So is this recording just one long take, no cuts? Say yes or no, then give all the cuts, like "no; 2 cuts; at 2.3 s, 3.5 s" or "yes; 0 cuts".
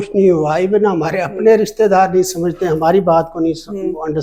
yes; 0 cuts